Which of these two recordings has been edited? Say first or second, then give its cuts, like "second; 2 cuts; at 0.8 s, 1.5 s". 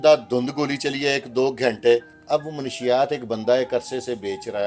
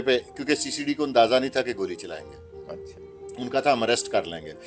first; 1 cut; at 2.1 s